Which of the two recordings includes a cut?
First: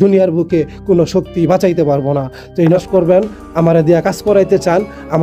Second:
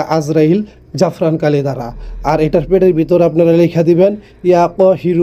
first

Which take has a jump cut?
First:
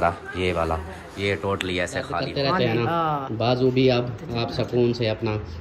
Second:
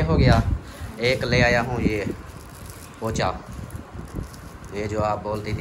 first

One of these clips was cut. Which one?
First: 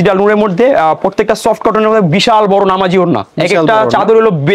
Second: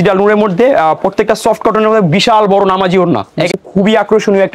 second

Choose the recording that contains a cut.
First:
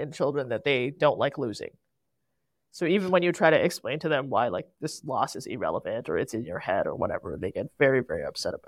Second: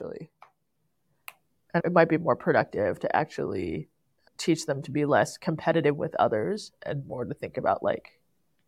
second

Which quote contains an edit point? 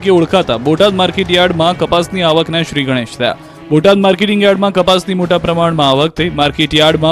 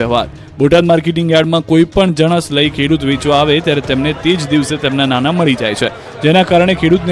first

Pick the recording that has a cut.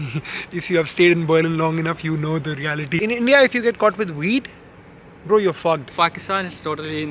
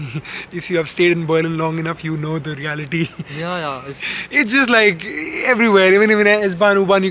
first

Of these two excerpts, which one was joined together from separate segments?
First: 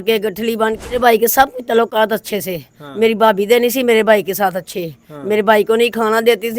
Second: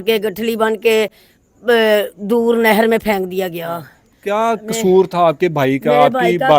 first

